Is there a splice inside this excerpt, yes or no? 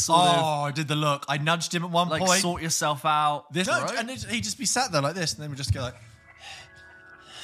yes